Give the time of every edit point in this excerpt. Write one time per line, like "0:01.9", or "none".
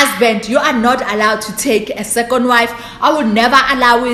none